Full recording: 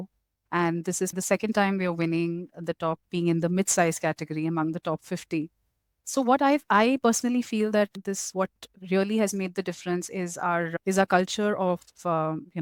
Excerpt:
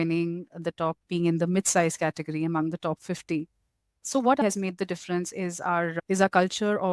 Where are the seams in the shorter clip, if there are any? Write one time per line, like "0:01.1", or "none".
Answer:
0:04.4